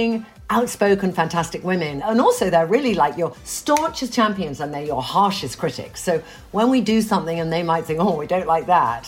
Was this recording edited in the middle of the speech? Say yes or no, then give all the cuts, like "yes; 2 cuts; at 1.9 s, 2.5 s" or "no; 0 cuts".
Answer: yes; 1 cut; at 1.9 s